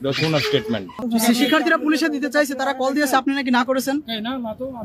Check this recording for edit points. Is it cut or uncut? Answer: cut